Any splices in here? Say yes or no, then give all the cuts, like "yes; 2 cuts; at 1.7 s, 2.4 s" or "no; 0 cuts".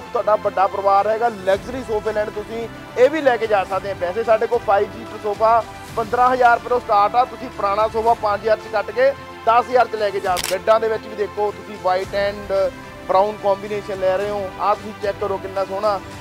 yes; 1 cut; at 10.4 s